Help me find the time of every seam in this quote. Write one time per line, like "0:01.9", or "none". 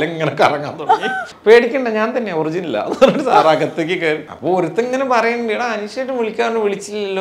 0:01.2
0:04.3